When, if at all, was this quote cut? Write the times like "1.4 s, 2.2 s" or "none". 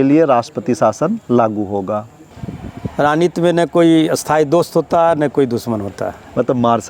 2.2 s